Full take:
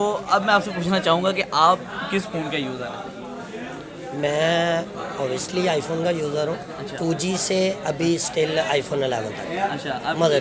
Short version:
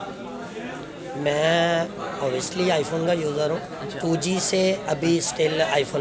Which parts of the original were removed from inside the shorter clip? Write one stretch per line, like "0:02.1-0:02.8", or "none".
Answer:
none